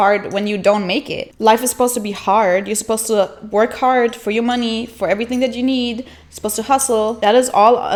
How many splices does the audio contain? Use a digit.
0